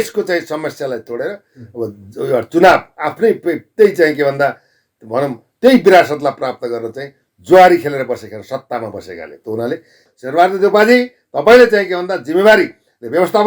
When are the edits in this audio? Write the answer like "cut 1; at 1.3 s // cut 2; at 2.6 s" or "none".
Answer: cut 1; at 10.1 s